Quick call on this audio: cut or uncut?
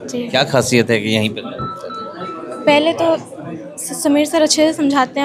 uncut